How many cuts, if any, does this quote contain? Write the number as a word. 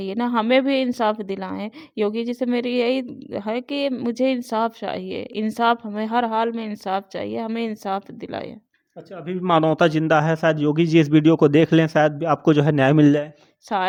zero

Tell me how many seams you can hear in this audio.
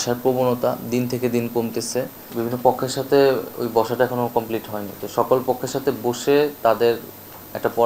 one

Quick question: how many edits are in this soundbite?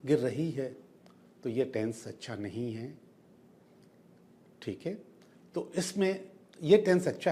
zero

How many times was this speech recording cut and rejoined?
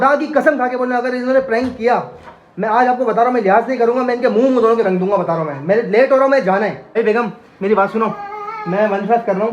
one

